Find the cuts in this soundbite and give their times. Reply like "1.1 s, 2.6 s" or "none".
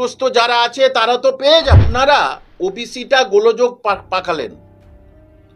1.9 s